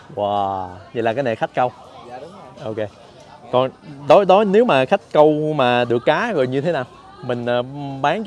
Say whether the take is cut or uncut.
uncut